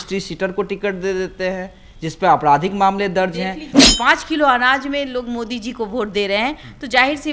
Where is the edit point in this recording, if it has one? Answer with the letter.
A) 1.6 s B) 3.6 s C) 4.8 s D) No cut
B